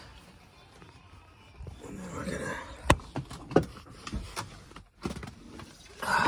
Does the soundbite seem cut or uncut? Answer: uncut